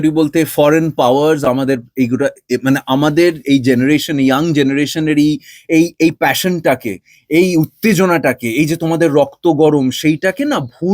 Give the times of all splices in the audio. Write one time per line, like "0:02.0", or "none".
none